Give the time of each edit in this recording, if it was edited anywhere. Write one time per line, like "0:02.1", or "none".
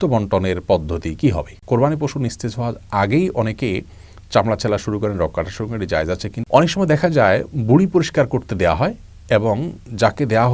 0:01.5
0:06.3